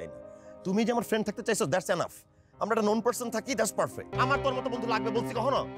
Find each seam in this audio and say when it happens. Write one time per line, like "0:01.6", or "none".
0:04.1